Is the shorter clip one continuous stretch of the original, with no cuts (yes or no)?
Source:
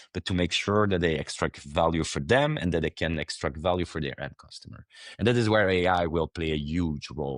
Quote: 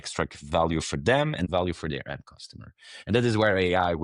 no